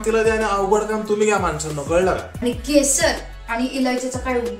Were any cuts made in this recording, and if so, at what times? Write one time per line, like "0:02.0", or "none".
0:02.3